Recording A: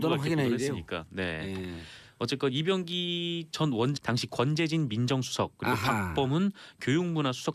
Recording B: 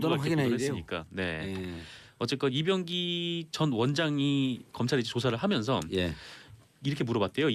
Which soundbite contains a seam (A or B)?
B